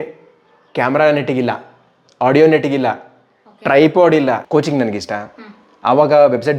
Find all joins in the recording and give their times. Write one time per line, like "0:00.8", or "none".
0:04.4